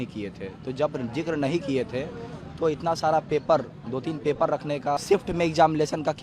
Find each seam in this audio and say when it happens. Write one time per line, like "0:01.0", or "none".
0:05.0